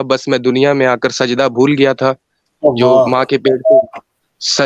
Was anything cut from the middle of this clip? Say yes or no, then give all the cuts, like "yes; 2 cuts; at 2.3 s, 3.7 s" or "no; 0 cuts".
no; 0 cuts